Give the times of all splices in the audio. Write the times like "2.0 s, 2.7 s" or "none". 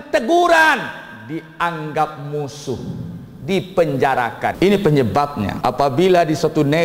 4.5 s, 5.5 s